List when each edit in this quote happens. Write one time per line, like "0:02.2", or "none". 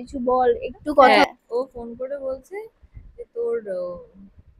0:01.2